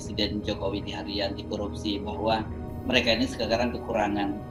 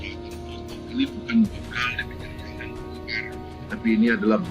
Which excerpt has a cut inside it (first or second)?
second